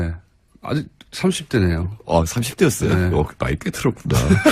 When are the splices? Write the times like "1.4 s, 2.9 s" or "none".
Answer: 3.1 s